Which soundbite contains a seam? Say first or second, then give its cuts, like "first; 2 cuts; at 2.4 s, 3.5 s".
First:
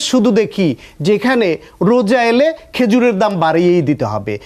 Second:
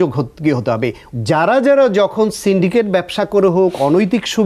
second; 1 cut; at 1.0 s